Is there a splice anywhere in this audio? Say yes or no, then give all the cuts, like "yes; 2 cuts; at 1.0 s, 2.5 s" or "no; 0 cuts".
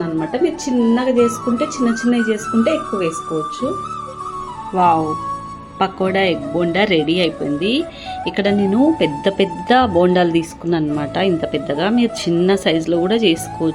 yes; 1 cut; at 4.1 s